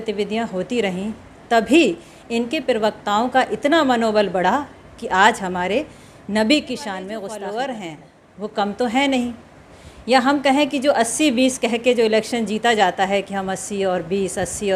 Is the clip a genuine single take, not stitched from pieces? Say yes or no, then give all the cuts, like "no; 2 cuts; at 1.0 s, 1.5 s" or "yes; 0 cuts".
no; 1 cut; at 7.1 s